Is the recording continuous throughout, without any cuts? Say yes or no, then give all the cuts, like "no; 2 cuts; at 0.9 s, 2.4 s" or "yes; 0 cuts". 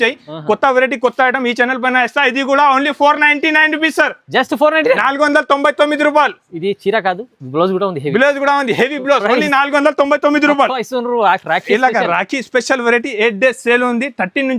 yes; 0 cuts